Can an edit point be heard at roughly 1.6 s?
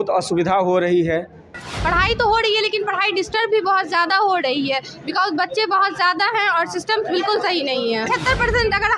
yes; 2 cuts; at 1.6 s, 8.1 s

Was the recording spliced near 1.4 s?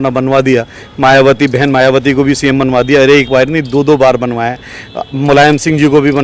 no; 0 cuts

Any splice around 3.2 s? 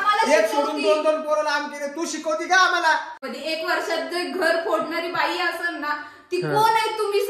yes; 1 cut; at 3.2 s

